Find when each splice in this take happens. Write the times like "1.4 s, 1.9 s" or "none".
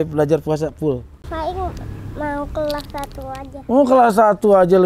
1.2 s